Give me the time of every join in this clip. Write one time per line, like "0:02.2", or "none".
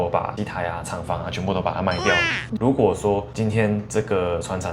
0:02.4